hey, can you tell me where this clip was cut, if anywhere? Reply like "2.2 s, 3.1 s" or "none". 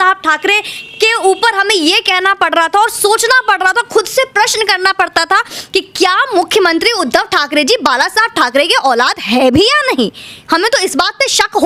none